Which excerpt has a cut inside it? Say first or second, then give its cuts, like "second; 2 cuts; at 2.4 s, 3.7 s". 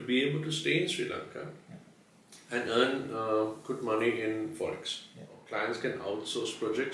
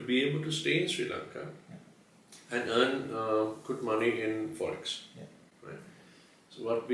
first; 1 cut; at 5.5 s